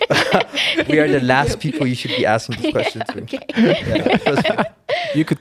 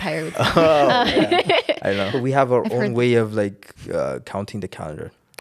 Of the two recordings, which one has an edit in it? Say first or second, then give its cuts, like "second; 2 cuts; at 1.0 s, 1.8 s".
second; 1 cut; at 2.1 s